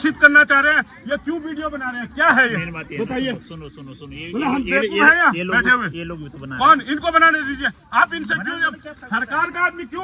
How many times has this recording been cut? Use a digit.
0